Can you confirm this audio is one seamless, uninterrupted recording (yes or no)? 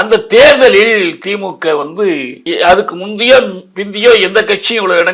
no